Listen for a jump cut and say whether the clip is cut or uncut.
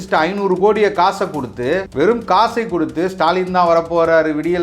cut